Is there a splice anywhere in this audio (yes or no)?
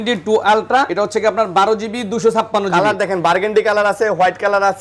yes